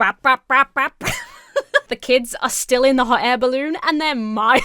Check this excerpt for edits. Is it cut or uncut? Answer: cut